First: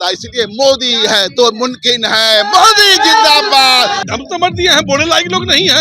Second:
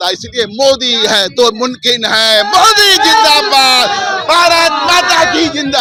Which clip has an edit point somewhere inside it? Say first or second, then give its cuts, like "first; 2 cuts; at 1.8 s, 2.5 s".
first; 1 cut; at 4.0 s